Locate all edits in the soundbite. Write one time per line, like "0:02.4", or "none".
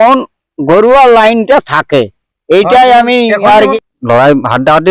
0:03.7

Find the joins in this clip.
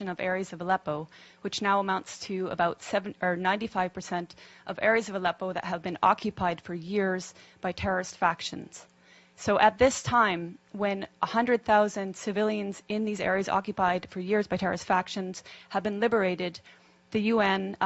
0:11.5

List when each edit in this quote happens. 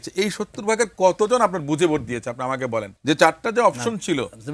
0:02.9

